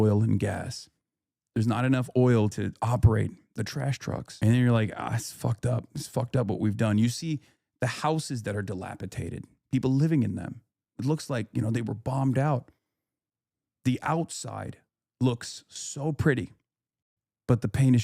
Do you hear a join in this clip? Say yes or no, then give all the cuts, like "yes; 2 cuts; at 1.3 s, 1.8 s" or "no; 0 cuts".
yes; 2 cuts; at 2.5 s, 4.3 s